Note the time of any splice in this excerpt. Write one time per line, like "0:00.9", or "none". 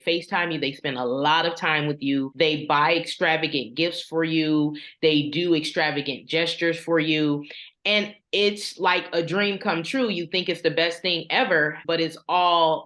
0:02.3
0:11.8